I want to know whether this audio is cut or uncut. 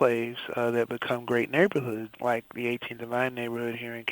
cut